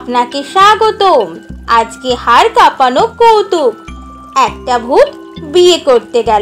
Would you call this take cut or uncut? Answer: uncut